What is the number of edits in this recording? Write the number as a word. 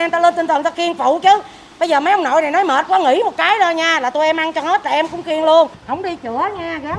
one